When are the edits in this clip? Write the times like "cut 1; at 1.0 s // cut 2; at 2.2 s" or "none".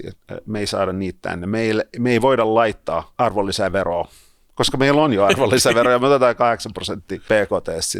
cut 1; at 3.1 s // cut 2; at 7.1 s